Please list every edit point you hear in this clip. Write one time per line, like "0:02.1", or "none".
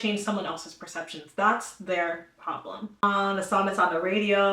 0:03.0